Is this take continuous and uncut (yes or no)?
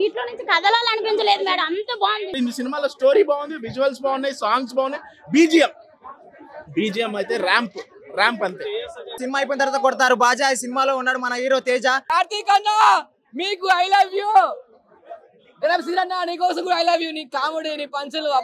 no